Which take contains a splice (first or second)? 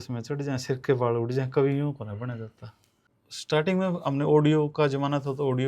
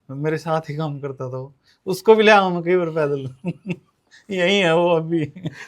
first